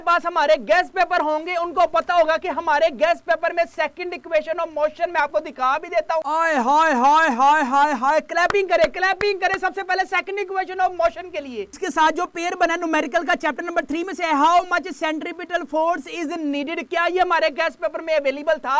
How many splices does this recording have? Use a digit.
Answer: 0